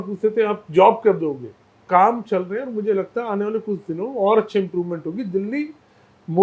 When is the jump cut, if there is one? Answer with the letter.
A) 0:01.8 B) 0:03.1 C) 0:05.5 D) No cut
A